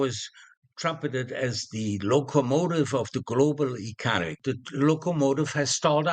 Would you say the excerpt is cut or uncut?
cut